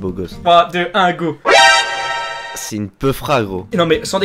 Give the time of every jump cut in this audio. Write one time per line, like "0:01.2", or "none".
none